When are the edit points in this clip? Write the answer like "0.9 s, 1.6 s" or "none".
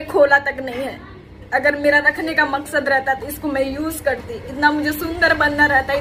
none